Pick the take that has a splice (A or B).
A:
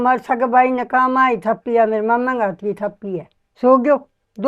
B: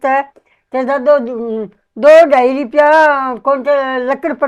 A